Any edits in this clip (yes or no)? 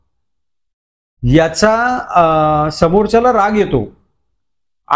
no